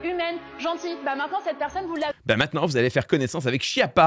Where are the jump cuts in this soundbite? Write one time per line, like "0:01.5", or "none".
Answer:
none